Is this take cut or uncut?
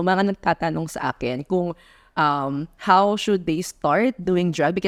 uncut